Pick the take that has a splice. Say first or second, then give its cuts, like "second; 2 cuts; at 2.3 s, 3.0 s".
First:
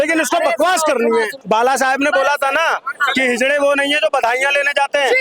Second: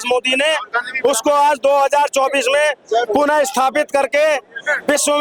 first; 1 cut; at 1.4 s